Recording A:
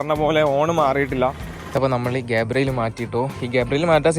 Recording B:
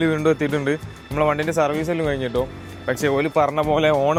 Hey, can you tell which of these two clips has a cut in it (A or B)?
A